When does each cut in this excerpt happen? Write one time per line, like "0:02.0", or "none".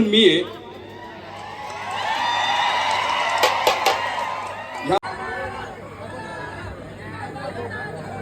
0:05.0